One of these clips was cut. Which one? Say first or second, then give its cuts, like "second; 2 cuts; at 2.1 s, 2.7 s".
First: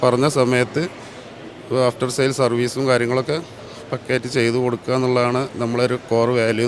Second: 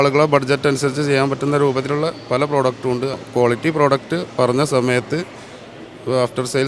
second; 1 cut; at 3.2 s